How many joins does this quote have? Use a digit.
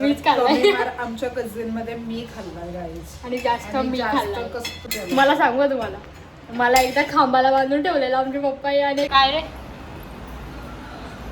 2